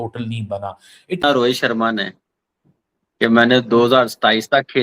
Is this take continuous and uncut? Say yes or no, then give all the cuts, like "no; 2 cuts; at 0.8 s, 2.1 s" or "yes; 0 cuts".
no; 1 cut; at 1.2 s